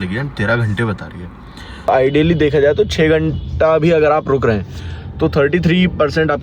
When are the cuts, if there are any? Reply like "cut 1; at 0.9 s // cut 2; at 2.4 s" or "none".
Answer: cut 1; at 1.9 s